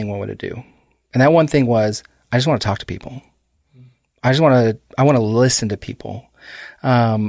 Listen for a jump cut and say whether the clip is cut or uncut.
uncut